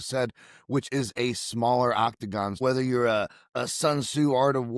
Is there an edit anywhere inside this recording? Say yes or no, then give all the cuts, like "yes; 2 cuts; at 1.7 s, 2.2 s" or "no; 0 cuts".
yes; 1 cut; at 2.6 s